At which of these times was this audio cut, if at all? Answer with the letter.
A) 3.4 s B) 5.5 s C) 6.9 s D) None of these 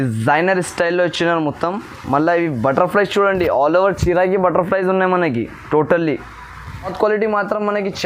C